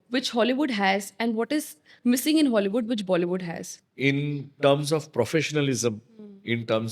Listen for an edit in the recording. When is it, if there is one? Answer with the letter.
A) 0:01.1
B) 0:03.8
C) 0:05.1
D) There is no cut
B